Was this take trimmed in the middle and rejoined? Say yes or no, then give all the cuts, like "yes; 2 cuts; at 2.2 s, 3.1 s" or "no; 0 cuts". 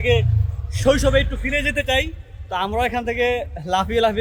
no; 0 cuts